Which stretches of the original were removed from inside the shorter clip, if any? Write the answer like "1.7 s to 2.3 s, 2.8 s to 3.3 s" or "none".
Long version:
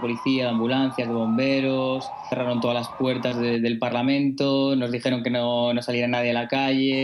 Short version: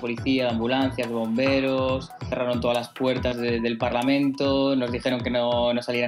none